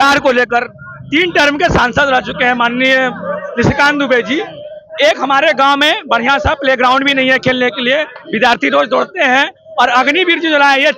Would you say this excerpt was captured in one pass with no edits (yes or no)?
yes